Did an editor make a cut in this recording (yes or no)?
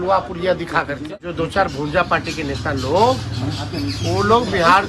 yes